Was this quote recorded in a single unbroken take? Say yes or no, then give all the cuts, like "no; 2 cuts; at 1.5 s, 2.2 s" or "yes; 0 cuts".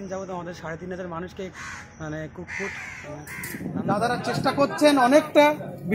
no; 1 cut; at 3.6 s